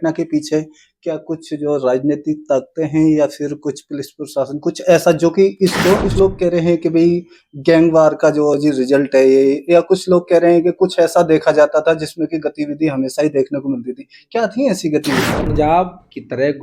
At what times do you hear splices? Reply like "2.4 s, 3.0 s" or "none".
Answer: 6.1 s, 15.4 s